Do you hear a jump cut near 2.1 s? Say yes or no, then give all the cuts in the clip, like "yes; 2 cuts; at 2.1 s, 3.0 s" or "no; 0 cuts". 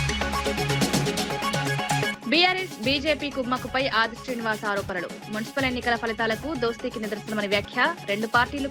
yes; 1 cut; at 2.1 s